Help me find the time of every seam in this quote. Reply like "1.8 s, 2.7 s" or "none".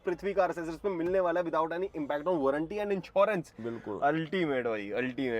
none